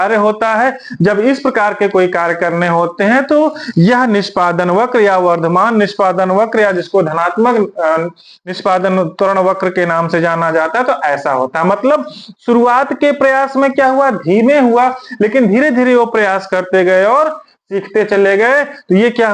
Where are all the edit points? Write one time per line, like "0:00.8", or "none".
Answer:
none

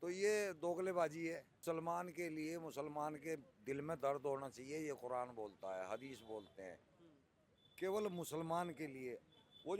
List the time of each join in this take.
0:01.5

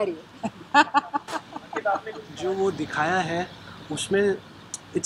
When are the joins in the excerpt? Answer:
0:02.2

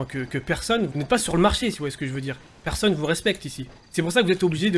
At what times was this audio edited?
0:00.9

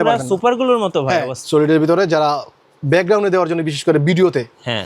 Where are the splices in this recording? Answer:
0:01.4

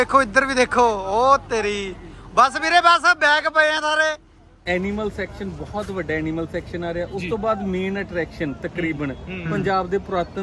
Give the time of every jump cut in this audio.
0:04.6

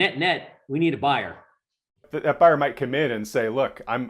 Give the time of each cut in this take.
0:02.1

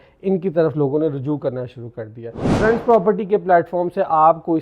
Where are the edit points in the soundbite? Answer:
0:02.5

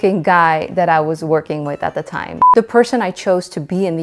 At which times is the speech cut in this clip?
0:02.5

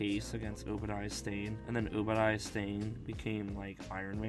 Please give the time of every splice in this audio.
none

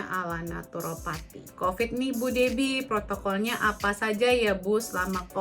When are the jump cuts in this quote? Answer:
0:01.5

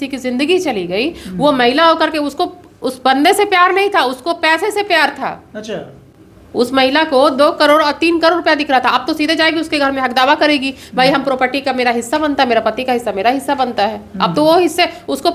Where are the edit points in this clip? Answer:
none

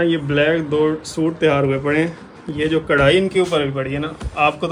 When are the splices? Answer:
none

